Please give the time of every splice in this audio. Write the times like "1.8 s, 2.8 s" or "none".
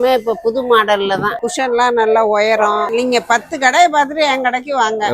2.9 s